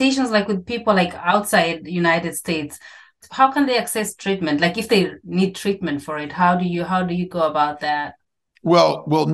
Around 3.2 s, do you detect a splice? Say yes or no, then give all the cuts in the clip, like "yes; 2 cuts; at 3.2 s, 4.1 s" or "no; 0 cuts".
yes; 1 cut; at 3.2 s